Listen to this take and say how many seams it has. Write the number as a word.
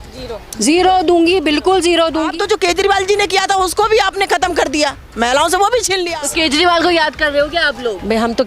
two